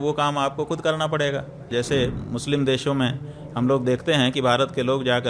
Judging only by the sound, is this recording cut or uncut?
cut